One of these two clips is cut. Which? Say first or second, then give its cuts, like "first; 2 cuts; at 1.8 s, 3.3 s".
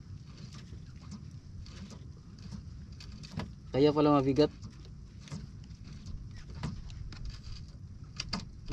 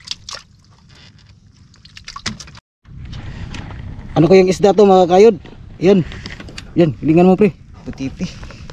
second; 1 cut; at 2.5 s